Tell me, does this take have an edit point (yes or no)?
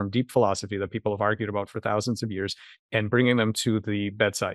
no